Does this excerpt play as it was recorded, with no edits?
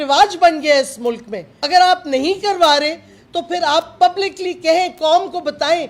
no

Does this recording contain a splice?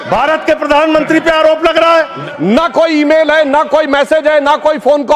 yes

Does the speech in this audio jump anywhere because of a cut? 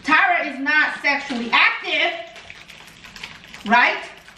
no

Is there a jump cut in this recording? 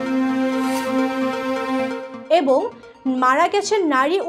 no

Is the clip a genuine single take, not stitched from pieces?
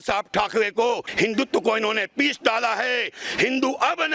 no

